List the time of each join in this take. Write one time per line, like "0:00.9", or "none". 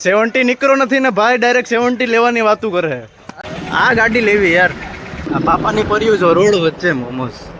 0:03.5
0:05.2